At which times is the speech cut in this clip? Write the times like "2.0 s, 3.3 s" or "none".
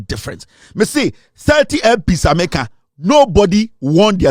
none